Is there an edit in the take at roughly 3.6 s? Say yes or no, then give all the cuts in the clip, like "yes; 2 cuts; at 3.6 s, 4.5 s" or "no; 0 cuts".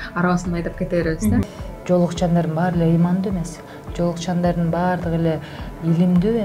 no; 1 cut; at 1.5 s